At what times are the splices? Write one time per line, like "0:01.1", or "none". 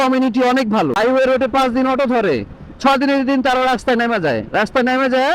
0:01.0